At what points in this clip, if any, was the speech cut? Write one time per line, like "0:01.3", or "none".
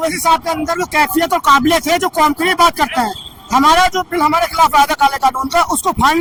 none